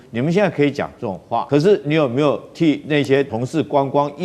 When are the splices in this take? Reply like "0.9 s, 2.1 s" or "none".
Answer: 1.4 s, 3.3 s